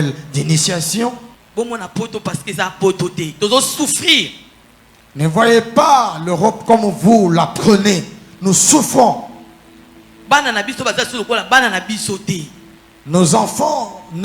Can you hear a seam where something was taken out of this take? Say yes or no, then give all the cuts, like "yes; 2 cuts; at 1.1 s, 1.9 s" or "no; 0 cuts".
yes; 1 cut; at 1.3 s